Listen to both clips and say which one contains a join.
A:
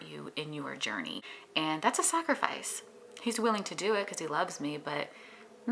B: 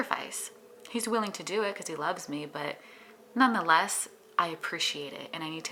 A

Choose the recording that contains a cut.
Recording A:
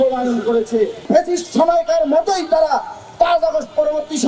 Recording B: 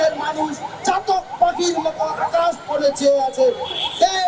A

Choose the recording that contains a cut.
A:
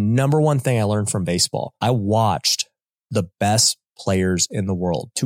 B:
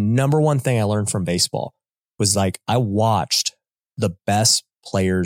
A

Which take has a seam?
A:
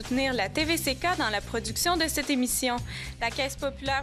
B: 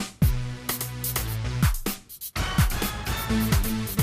B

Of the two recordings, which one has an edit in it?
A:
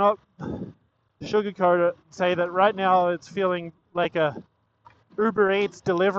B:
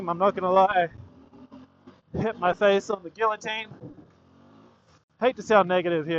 B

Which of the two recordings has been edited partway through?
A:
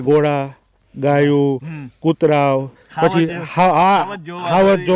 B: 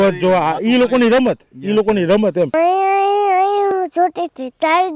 B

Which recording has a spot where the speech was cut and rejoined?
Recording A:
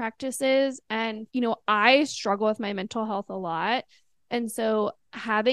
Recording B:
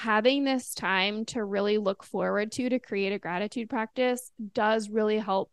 A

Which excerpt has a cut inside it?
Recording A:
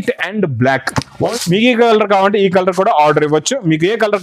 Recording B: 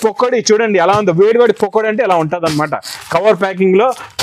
A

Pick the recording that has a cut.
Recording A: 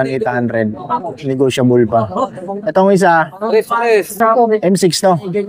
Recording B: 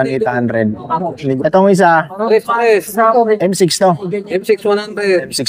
B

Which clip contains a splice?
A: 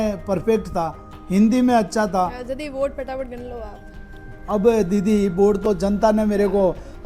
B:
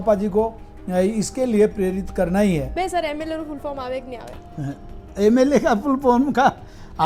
B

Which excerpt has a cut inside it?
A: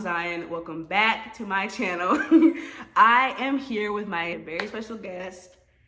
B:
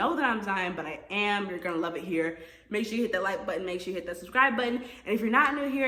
A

